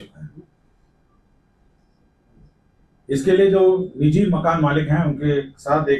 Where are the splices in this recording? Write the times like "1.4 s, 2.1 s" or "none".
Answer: none